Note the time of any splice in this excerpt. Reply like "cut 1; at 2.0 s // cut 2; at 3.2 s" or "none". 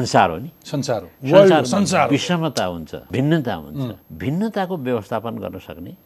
cut 1; at 3.0 s // cut 2; at 4.0 s